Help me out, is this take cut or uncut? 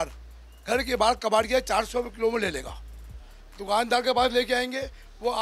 uncut